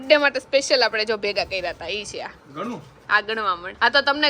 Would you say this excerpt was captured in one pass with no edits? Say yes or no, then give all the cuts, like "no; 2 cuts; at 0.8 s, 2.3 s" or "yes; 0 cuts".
yes; 0 cuts